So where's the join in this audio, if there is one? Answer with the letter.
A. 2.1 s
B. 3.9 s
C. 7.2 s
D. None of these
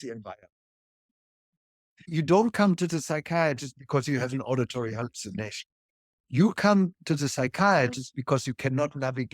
A